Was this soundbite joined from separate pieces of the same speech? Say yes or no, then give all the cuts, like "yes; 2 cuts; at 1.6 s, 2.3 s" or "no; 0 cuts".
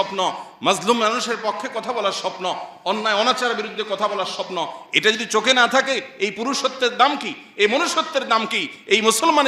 no; 0 cuts